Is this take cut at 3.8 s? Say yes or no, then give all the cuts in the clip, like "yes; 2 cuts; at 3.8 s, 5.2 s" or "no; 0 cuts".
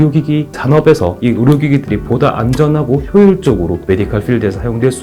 yes; 2 cuts; at 1.2 s, 3.8 s